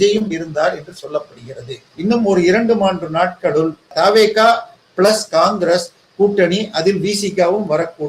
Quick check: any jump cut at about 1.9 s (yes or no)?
yes